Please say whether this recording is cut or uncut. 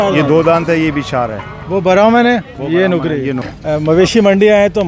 cut